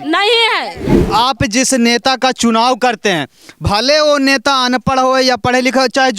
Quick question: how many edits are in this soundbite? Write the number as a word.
one